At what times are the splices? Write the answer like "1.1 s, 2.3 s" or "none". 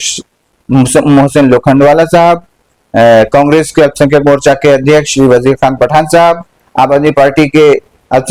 none